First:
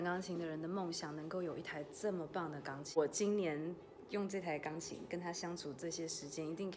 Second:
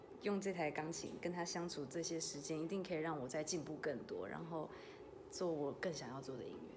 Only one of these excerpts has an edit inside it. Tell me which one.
first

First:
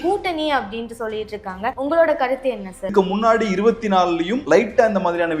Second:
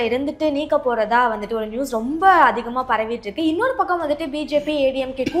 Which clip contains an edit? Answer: first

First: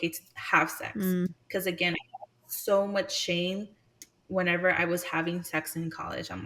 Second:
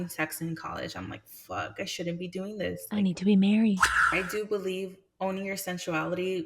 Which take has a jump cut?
second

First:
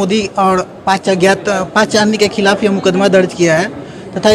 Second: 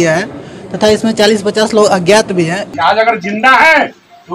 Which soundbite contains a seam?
second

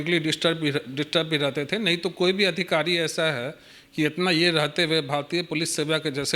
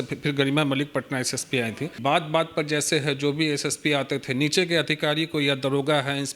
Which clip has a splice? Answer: second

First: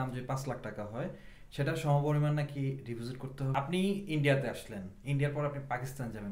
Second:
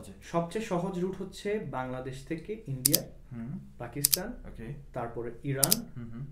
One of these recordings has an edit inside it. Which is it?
first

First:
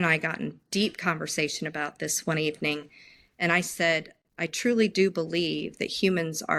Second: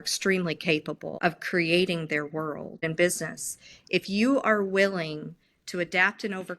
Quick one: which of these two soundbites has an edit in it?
second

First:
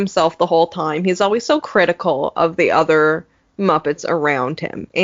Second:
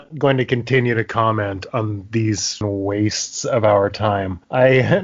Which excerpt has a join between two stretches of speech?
second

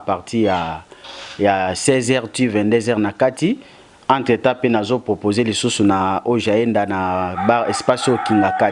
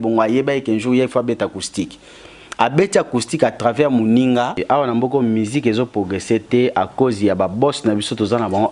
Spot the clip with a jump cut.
second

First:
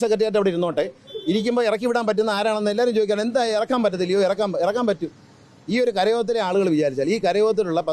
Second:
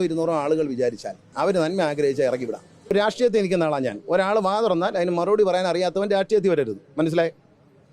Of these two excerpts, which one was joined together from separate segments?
second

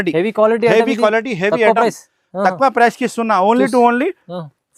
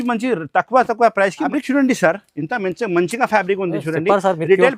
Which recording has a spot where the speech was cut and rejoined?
second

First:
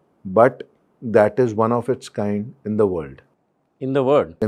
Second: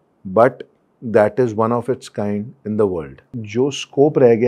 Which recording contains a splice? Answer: second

